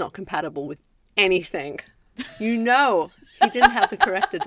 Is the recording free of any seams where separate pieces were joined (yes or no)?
no